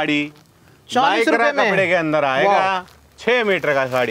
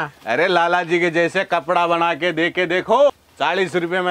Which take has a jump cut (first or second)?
second